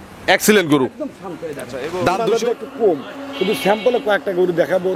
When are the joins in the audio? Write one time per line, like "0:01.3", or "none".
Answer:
0:02.2